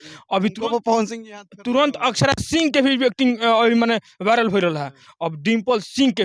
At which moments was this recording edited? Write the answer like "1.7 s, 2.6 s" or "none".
none